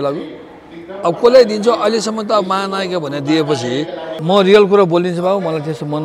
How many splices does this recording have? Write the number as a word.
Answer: one